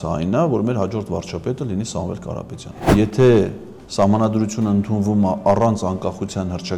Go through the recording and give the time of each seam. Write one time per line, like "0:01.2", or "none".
0:02.9